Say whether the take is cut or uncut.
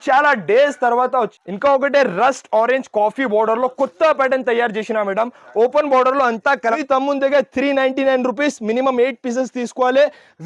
cut